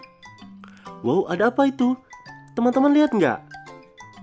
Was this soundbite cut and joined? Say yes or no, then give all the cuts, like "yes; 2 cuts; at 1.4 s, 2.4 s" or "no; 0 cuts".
yes; 1 cut; at 1.0 s